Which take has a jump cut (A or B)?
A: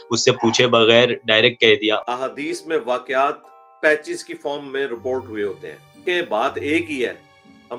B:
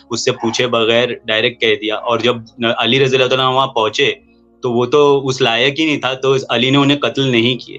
A